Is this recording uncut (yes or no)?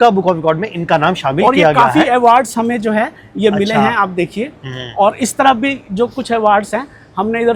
yes